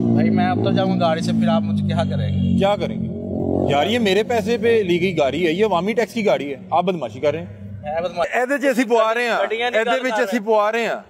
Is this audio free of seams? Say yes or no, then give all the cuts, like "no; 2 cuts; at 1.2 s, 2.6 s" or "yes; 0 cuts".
no; 1 cut; at 8.3 s